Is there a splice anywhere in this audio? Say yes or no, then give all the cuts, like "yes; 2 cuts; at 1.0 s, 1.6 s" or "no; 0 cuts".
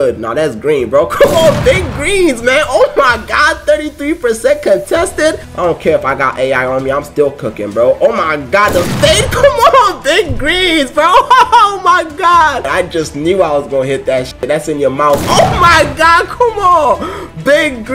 yes; 2 cuts; at 5.5 s, 12.7 s